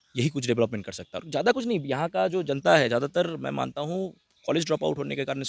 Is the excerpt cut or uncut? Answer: uncut